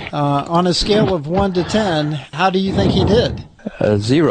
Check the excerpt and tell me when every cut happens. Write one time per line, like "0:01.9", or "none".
none